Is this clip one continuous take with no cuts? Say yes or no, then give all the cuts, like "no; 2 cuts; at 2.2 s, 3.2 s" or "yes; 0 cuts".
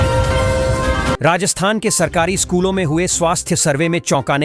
no; 1 cut; at 1.1 s